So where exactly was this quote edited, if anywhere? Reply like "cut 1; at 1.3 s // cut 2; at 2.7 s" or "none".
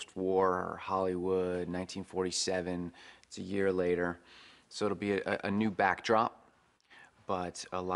none